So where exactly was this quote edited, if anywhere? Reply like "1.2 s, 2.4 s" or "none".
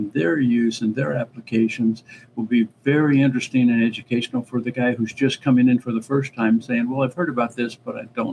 none